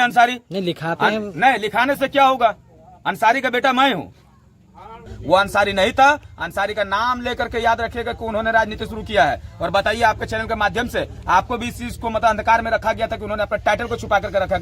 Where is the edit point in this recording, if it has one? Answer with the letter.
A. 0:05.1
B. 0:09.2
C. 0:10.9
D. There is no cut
A